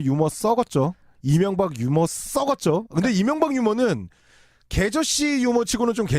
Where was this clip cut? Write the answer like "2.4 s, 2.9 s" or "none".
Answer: 2.9 s